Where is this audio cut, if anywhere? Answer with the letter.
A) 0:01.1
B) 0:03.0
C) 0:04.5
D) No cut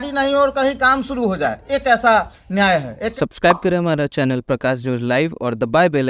B